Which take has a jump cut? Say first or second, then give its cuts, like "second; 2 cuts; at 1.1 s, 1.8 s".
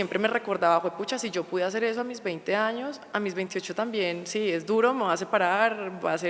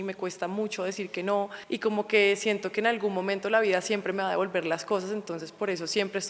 second; 1 cut; at 1.6 s